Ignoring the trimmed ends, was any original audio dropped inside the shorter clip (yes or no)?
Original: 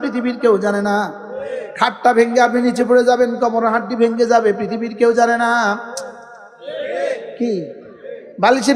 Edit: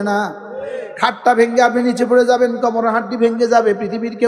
no